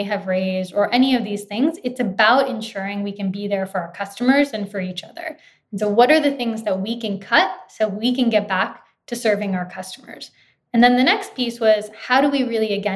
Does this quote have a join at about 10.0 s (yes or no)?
no